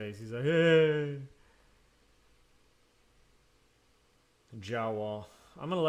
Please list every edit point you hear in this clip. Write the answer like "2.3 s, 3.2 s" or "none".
none